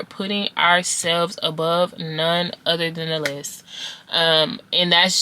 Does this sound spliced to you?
no; 0 cuts

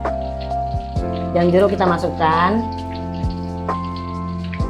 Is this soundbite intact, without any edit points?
yes; 0 cuts

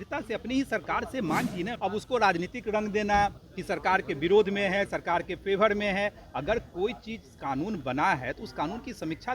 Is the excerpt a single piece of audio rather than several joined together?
no; 2 cuts; at 1.7 s, 5.3 s

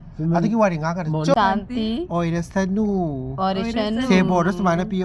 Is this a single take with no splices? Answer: no; 1 cut; at 1.3 s

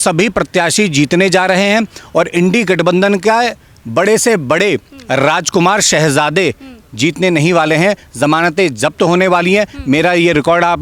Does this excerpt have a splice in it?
no; 0 cuts

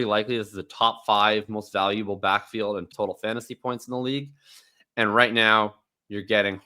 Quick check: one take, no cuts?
no; 1 cut; at 2.9 s

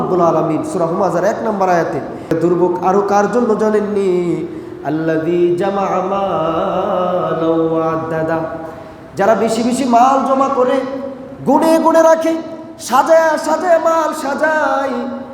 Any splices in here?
yes; 1 cut; at 2.3 s

